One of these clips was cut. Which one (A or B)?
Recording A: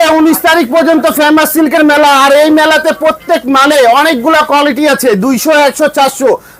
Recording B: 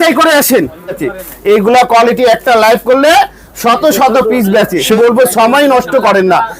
B